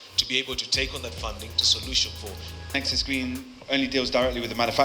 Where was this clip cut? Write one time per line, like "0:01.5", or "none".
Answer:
0:02.7